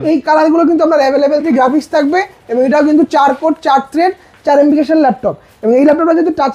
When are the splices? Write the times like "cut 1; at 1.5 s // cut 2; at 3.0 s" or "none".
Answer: cut 1; at 1.5 s